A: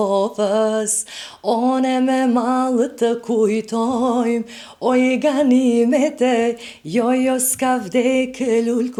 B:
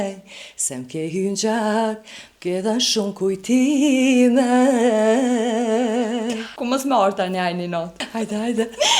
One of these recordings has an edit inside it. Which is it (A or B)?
B